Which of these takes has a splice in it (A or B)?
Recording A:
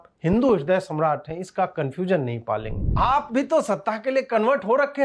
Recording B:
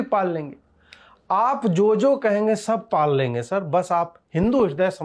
A